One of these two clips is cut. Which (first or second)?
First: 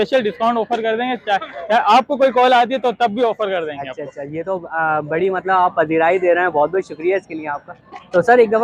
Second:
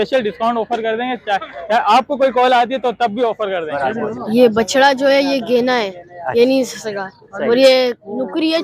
second